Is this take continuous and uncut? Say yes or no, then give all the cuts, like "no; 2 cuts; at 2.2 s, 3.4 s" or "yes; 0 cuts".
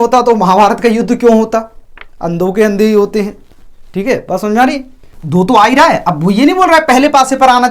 no; 1 cut; at 5.2 s